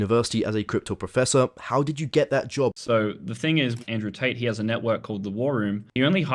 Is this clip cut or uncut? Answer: cut